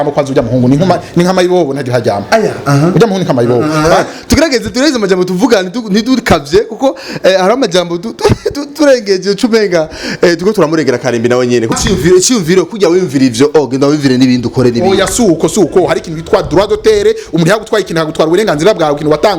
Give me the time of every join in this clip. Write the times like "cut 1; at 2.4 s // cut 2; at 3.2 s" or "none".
cut 1; at 11.7 s